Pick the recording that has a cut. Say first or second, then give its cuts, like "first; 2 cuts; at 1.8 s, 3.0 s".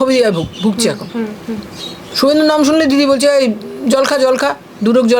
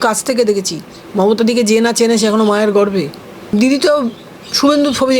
second; 1 cut; at 3.5 s